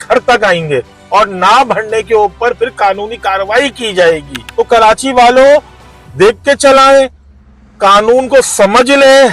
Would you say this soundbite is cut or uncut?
cut